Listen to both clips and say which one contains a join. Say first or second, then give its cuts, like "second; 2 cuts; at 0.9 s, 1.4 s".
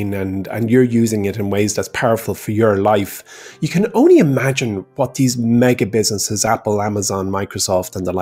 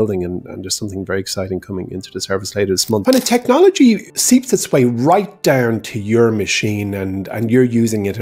second; 2 cuts; at 3.0 s, 4.1 s